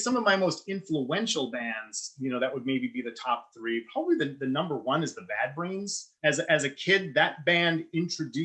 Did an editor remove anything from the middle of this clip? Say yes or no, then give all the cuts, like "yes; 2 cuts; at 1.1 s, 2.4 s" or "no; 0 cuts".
yes; 1 cut; at 6.1 s